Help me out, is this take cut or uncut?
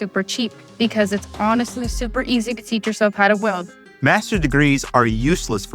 cut